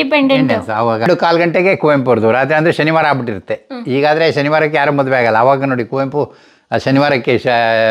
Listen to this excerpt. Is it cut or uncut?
cut